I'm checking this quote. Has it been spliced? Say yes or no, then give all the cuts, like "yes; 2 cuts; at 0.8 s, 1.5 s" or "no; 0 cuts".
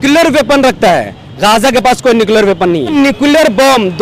yes; 1 cut; at 2.9 s